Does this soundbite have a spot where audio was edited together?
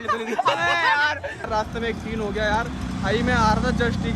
yes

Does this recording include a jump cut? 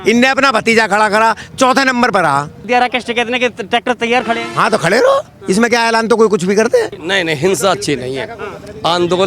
yes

